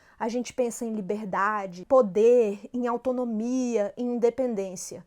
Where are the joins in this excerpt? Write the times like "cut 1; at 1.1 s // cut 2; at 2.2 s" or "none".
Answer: cut 1; at 1.8 s

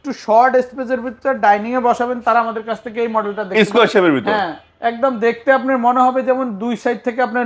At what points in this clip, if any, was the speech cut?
none

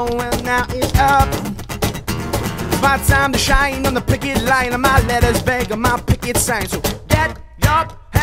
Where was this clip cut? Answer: none

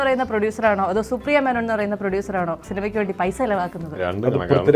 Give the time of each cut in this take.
cut 1; at 2.7 s

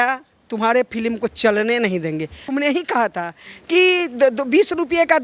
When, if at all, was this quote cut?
cut 1; at 2.4 s

